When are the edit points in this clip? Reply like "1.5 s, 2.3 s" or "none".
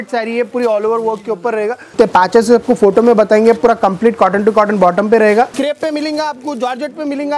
1.9 s, 5.5 s

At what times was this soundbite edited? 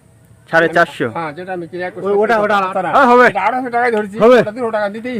2.7 s

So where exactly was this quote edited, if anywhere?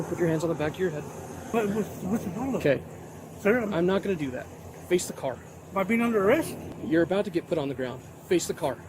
1.4 s, 5.5 s, 6.8 s

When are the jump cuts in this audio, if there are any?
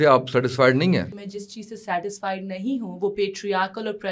1.2 s

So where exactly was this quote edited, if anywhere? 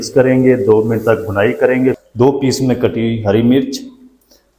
2.0 s

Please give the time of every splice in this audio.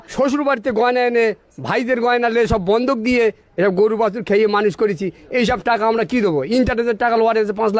none

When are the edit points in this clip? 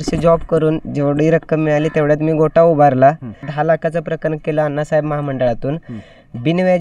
3.5 s

